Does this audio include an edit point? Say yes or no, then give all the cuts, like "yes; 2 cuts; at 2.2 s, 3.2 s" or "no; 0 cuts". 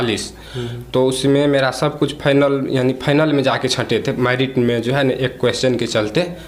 no; 0 cuts